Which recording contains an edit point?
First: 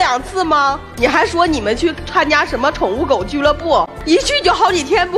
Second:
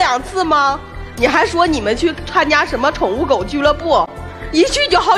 first; 2 cuts; at 0.9 s, 3.9 s

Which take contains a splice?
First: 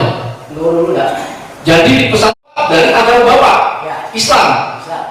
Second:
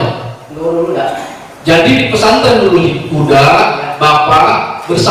first; 1 cut; at 2.4 s

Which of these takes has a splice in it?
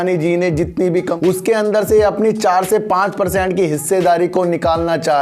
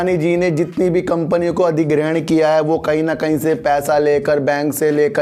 first; 1 cut; at 1.1 s

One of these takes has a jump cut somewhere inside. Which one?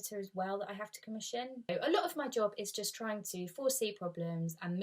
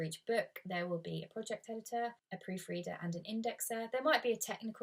first; 1 cut; at 1.6 s

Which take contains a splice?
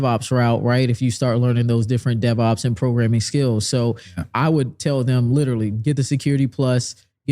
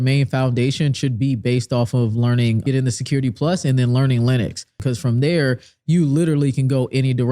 second; 2 cuts; at 2.6 s, 4.7 s

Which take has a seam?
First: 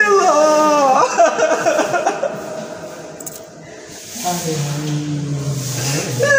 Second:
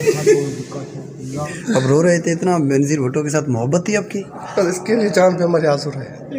second; 1 cut; at 1.5 s

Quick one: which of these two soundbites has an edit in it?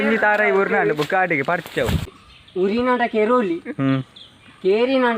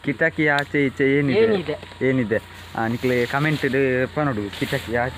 first; 1 cut; at 2.2 s

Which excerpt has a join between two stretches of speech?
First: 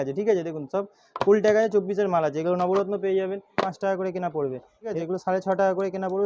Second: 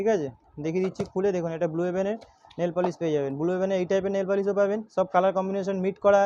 first; 2 cuts; at 3.6 s, 5.0 s

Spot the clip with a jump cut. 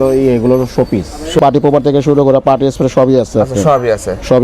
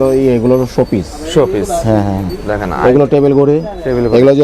first; 1 cut; at 1.4 s

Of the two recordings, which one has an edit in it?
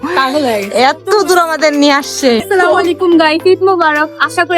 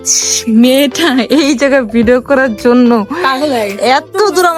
first; 1 cut; at 2.4 s

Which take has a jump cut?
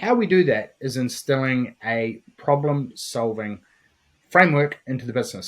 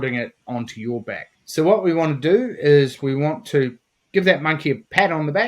second; 1 cut; at 1.3 s

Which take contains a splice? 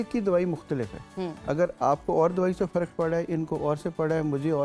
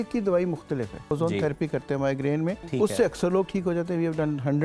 second; 2 cuts; at 1.1 s, 2.6 s

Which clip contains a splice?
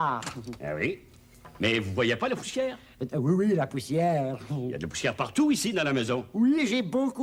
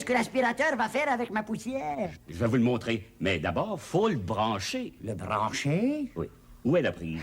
second; 1 cut; at 2.2 s

